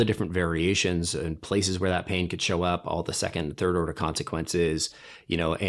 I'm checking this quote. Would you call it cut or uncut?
uncut